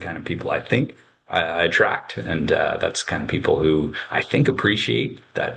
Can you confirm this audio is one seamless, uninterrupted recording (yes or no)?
yes